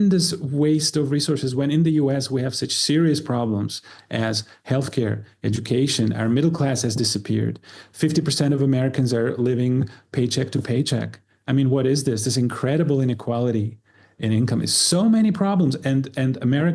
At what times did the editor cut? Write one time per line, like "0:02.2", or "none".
none